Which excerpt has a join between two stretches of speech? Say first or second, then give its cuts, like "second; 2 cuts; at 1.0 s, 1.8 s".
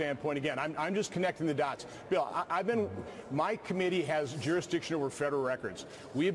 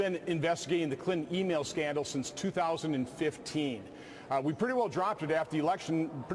second; 1 cut; at 4.6 s